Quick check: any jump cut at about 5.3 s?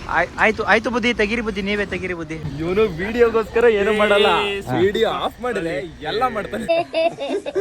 no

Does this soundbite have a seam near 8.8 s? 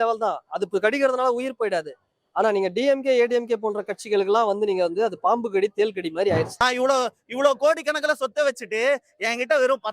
no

